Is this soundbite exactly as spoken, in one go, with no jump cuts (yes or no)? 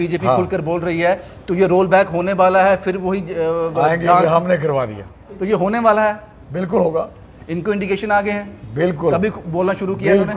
yes